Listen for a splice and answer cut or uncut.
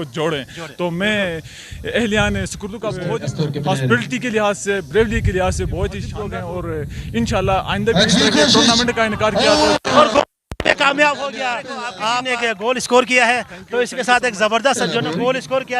cut